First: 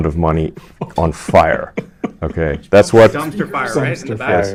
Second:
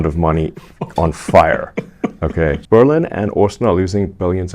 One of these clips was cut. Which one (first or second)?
second